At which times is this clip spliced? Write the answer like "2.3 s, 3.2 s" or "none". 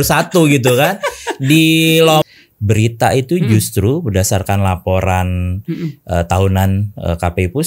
2.2 s